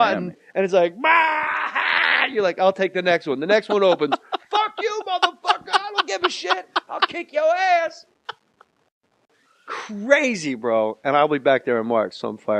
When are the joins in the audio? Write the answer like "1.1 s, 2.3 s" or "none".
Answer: 1.3 s